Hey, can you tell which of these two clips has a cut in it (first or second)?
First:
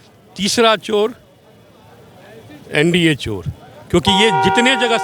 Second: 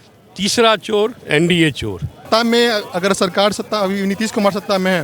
second